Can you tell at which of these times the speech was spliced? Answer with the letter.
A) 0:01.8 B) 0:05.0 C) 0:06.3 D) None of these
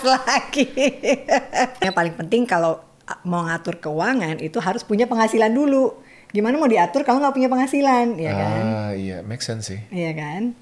A